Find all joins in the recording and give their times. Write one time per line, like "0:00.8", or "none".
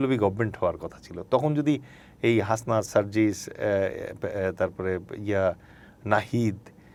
none